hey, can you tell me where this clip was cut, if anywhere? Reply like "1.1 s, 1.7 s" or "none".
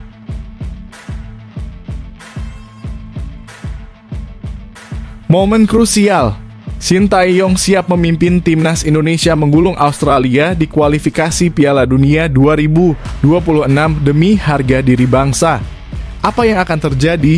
none